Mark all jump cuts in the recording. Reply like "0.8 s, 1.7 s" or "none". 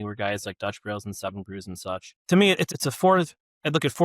2.1 s, 2.7 s